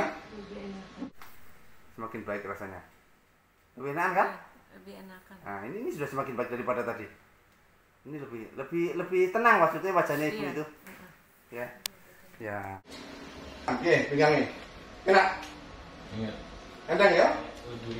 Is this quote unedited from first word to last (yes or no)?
no